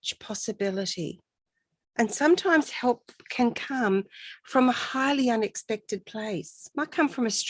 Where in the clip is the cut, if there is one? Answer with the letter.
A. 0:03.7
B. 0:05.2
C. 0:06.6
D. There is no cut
C